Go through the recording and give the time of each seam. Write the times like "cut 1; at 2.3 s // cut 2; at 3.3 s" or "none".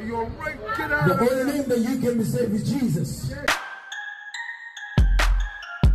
cut 1; at 3.4 s

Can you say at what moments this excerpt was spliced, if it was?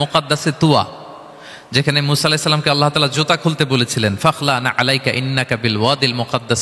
none

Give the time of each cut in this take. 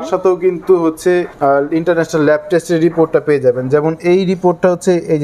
cut 1; at 1.3 s

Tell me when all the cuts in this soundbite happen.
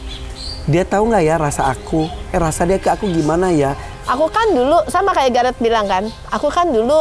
cut 1; at 3.9 s

